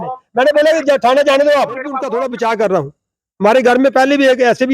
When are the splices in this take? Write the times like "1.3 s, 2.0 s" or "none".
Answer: 2.0 s